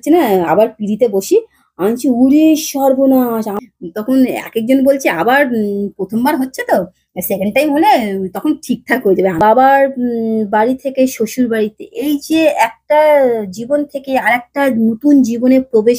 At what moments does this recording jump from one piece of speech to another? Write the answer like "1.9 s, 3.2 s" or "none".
3.5 s, 9.4 s